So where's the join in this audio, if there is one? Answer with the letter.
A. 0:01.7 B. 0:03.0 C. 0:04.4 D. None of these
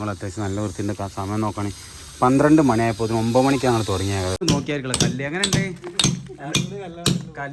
C